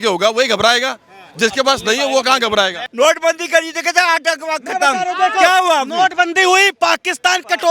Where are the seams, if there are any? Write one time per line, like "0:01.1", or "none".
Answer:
0:02.8